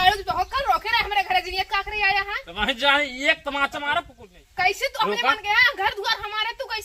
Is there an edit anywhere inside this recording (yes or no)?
no